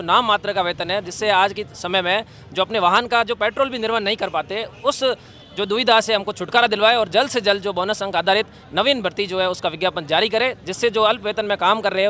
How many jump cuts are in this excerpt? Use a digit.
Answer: 0